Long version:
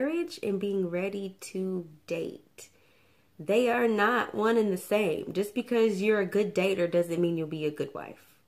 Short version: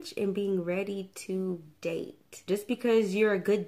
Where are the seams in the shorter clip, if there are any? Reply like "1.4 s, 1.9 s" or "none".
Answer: 2.4 s